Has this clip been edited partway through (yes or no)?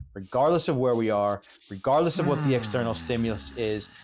no